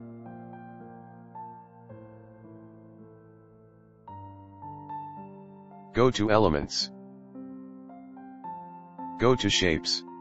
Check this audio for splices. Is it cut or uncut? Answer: uncut